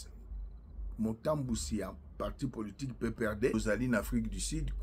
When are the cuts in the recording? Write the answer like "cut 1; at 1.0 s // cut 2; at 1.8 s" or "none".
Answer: cut 1; at 3.5 s

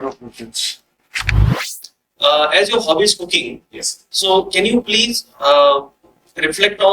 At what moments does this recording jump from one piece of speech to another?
cut 1; at 1.6 s

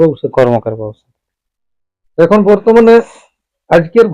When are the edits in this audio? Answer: none

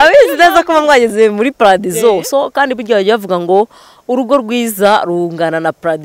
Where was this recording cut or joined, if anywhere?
none

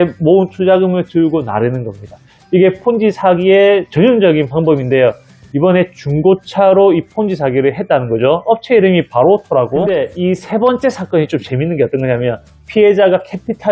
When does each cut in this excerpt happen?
cut 1; at 9.8 s

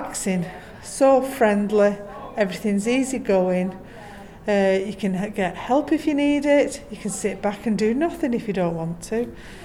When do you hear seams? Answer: none

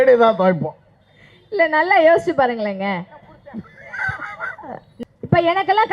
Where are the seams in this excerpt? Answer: cut 1; at 4.9 s

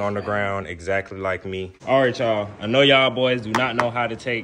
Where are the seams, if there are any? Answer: cut 1; at 1.9 s

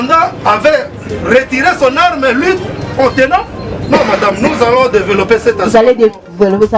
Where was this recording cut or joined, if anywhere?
none

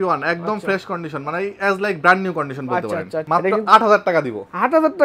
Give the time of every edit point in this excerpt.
cut 1; at 3.2 s

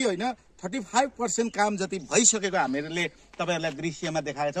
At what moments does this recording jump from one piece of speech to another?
none

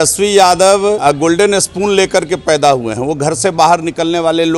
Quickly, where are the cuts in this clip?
cut 1; at 1.0 s

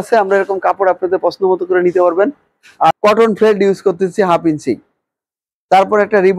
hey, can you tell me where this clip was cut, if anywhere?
cut 1; at 2.9 s

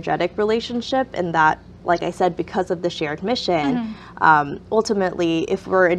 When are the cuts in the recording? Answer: none

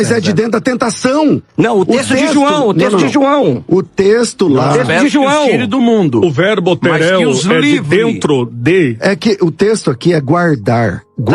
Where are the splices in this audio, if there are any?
none

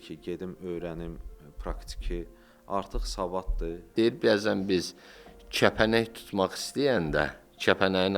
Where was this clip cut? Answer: cut 1; at 3.9 s

